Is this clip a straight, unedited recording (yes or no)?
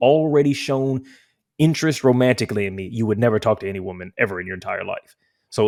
yes